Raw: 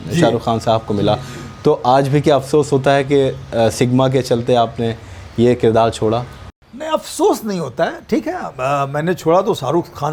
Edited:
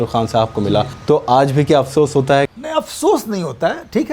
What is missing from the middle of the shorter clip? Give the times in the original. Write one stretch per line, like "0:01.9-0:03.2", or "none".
0:01.3-0:01.5
0:03.1-0:06.7